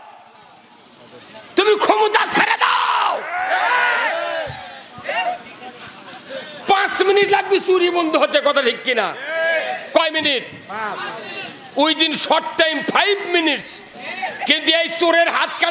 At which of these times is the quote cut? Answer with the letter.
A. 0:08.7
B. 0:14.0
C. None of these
B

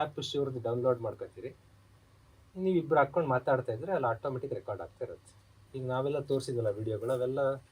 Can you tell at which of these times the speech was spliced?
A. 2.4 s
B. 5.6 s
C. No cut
B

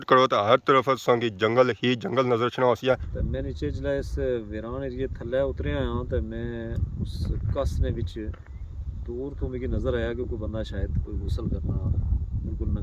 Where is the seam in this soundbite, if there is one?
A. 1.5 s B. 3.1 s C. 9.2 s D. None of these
B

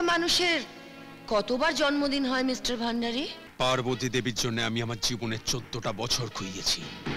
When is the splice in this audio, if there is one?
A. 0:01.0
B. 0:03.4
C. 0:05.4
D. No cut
B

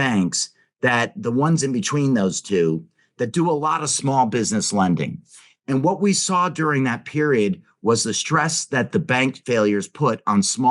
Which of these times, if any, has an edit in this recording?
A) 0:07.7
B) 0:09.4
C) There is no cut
B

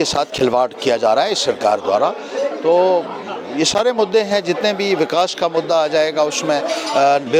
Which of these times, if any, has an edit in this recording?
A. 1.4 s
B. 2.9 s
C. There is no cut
C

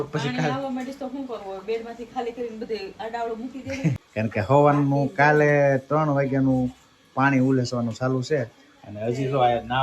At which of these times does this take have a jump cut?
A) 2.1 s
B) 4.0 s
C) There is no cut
B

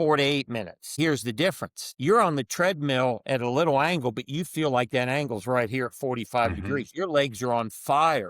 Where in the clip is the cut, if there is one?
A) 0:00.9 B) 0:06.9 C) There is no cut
A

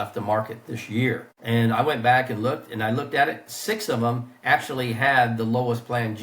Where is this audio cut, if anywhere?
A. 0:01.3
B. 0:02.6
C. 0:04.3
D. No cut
A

